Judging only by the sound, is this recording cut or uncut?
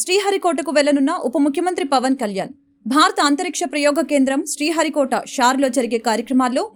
uncut